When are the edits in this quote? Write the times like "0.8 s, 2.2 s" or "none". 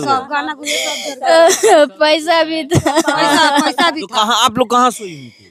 none